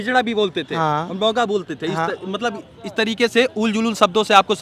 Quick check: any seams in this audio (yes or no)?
no